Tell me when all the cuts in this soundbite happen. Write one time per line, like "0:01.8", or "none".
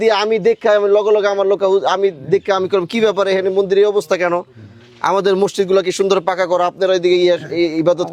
none